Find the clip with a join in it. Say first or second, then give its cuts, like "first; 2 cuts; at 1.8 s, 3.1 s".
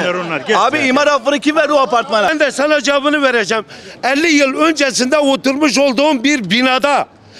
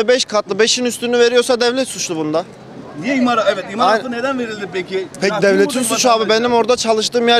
first; 1 cut; at 2.3 s